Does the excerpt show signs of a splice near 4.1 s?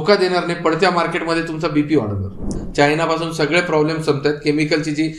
no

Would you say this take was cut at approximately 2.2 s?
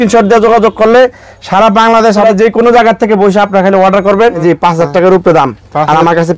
yes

